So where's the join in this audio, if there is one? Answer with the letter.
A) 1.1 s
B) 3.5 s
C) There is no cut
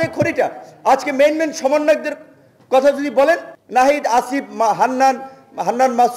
B